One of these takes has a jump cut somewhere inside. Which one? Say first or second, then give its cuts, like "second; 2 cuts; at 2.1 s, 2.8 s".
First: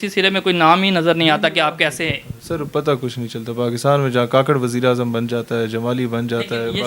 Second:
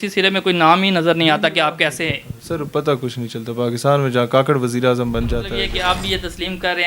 second; 1 cut; at 5.6 s